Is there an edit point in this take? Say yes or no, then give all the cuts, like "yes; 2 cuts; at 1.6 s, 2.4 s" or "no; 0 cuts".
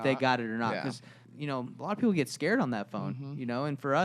yes; 1 cut; at 1.2 s